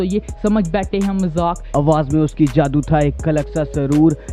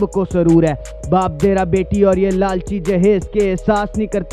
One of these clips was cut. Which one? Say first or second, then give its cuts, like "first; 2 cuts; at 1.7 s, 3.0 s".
first; 1 cut; at 1.6 s